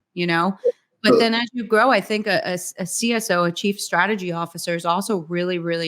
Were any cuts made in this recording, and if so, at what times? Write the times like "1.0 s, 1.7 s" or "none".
none